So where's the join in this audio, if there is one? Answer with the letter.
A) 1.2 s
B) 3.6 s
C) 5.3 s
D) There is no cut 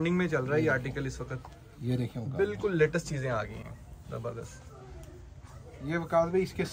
D